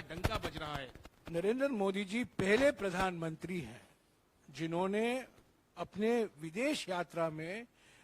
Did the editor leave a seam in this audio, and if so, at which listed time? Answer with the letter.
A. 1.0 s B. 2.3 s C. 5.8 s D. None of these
A